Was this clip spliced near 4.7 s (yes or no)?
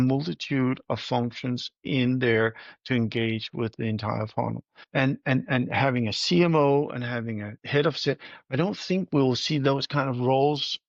yes